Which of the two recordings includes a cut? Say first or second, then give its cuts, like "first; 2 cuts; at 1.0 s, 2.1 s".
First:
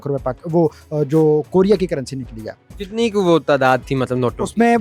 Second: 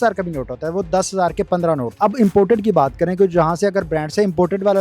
second; 1 cut; at 1.9 s